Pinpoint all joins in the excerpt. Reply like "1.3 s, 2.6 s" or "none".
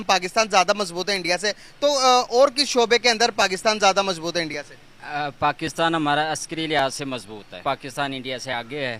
7.6 s